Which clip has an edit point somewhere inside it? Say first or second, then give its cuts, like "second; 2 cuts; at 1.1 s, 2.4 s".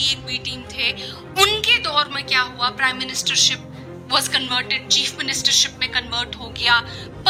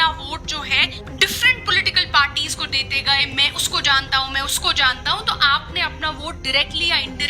second; 1 cut; at 1.0 s